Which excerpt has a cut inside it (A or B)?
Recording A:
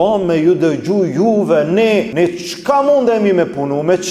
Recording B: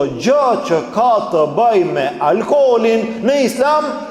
A